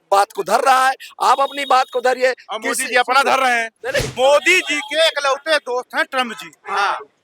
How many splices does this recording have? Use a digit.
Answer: 1